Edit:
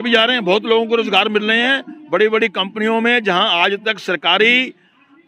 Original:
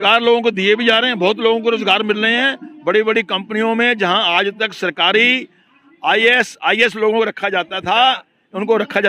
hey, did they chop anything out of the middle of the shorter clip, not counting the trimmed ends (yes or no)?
no